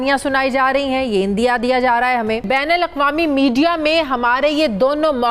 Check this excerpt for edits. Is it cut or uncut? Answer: cut